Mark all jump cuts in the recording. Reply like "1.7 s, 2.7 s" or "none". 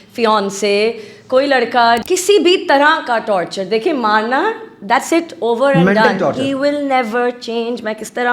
2.0 s